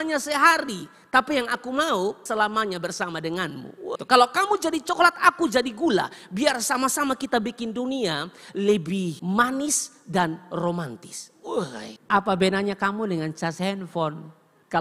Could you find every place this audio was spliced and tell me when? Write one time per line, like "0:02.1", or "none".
0:02.2
0:04.0
0:11.9